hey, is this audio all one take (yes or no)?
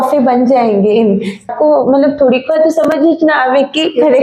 no